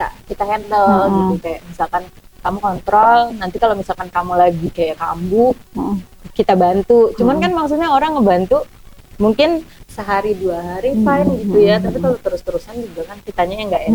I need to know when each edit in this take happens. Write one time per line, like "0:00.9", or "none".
none